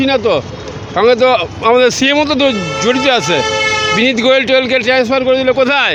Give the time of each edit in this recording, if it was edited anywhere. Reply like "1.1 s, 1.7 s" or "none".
none